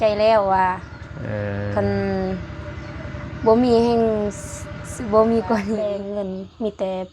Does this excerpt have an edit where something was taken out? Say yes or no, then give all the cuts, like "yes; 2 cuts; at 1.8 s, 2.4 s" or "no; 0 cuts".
yes; 1 cut; at 5.8 s